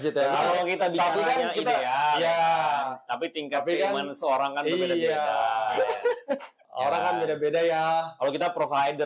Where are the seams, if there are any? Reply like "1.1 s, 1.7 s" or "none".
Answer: none